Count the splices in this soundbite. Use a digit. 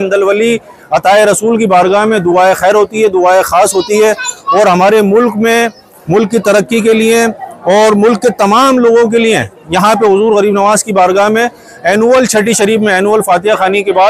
0